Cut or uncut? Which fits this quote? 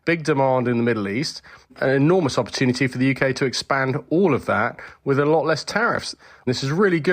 cut